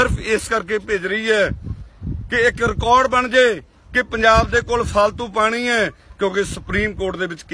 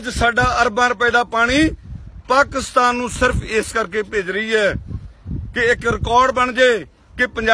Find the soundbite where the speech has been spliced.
first; 1 cut; at 6.0 s

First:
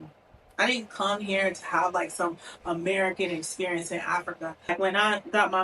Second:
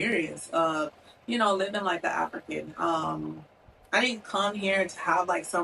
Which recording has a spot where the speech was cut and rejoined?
first; 1 cut; at 4.7 s

